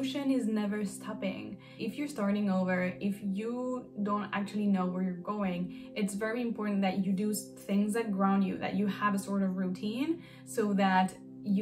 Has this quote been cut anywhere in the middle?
yes; 1 cut; at 1.6 s

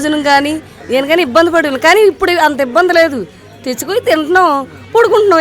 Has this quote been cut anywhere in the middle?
no; 0 cuts

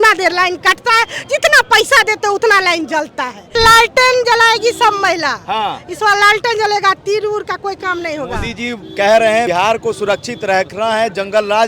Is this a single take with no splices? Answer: no; 2 cuts; at 3.6 s, 9.5 s

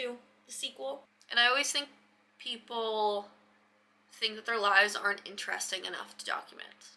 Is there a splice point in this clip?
yes; 1 cut; at 1.1 s

